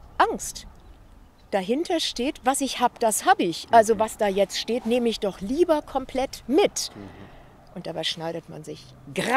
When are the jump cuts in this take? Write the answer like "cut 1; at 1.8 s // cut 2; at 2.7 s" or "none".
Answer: none